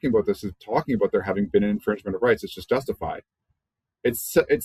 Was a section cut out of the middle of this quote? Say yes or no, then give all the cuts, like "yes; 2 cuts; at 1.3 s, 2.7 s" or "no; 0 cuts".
no; 0 cuts